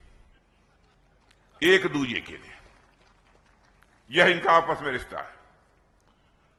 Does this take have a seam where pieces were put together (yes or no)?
no